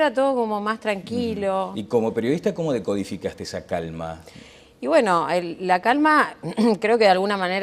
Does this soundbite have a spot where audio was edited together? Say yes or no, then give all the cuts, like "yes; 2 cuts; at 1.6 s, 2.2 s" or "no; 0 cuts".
yes; 1 cut; at 4.7 s